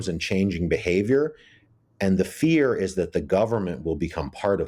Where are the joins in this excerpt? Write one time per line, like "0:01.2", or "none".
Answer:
none